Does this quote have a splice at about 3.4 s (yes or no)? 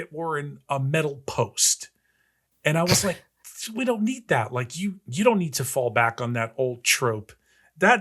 no